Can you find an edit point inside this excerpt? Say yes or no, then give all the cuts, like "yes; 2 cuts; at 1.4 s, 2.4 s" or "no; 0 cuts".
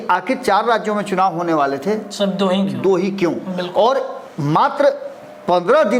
no; 0 cuts